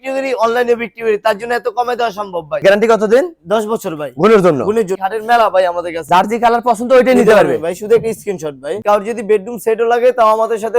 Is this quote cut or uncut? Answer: cut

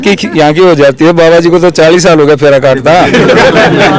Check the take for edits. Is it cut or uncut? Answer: uncut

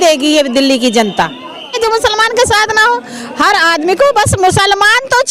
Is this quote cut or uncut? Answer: cut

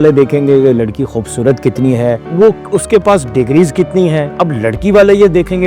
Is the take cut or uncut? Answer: uncut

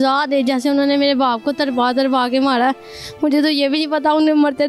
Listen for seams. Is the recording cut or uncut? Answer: uncut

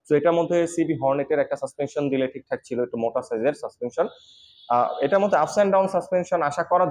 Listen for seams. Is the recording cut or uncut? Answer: uncut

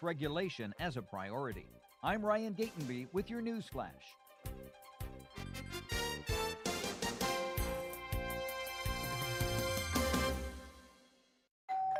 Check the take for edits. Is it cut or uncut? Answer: uncut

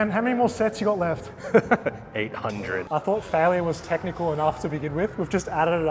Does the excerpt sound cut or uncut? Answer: cut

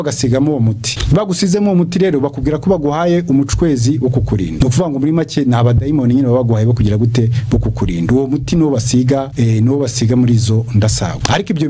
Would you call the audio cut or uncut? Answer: uncut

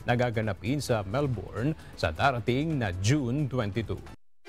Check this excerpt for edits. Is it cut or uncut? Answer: uncut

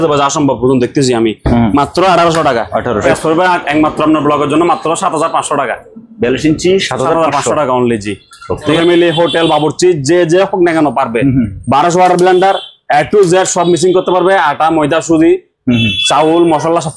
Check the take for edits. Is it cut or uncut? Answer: cut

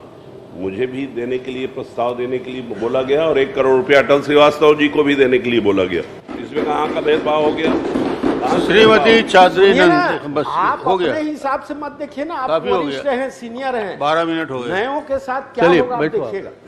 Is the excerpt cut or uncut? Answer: uncut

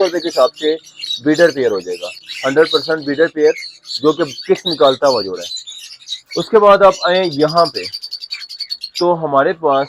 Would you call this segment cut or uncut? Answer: uncut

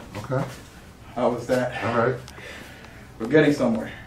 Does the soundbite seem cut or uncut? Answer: uncut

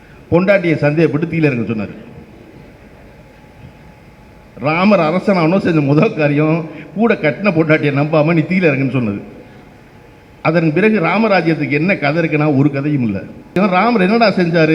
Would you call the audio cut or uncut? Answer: cut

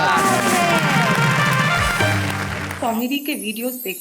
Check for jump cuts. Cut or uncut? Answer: cut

